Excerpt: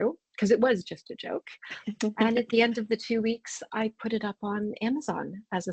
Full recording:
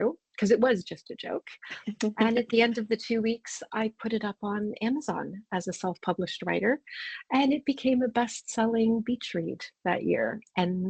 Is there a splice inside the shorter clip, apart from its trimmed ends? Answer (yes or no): no